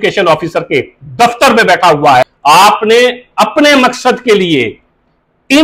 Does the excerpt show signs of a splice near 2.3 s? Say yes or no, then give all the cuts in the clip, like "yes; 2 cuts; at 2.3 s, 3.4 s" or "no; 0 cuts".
yes; 1 cut; at 2.3 s